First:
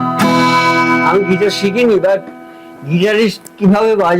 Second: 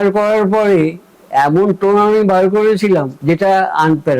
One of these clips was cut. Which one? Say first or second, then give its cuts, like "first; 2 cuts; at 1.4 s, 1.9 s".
second; 1 cut; at 3.1 s